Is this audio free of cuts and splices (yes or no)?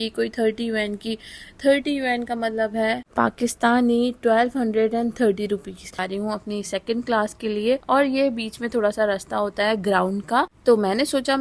no